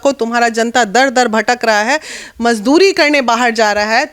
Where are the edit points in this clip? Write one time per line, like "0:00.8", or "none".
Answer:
none